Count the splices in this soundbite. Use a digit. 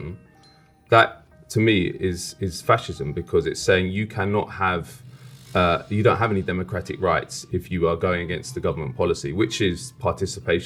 0